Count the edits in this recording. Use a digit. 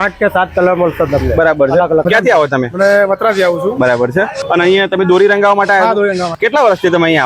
3